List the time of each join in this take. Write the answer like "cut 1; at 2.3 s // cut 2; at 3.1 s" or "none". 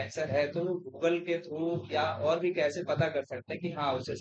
none